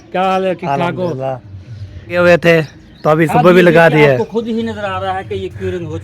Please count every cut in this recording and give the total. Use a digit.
1